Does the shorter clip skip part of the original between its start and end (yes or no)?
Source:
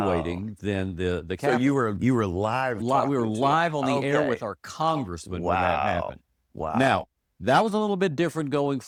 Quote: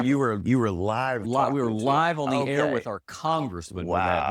no